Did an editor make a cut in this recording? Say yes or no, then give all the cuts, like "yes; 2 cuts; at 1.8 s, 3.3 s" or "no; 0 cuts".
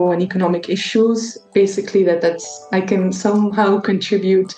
no; 0 cuts